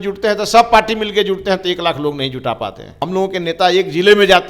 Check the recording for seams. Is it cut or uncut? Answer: cut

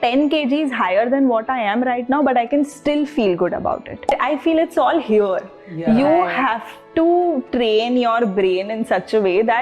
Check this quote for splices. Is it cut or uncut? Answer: cut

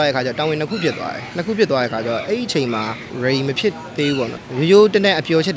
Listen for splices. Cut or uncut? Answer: cut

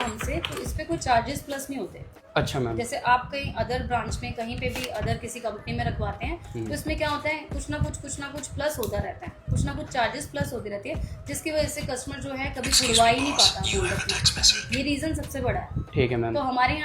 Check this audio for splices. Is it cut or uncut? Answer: uncut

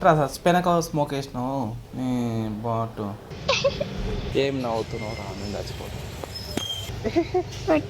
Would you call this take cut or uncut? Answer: cut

